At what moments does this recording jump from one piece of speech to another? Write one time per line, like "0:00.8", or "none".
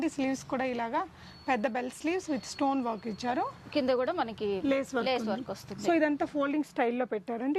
none